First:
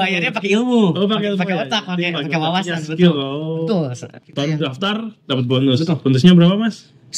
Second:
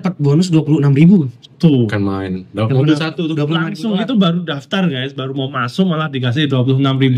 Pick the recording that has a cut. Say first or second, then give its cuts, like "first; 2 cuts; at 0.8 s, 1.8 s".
first; 1 cut; at 4.0 s